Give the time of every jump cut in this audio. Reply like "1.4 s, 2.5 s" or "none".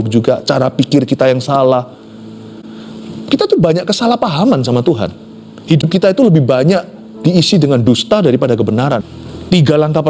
9.2 s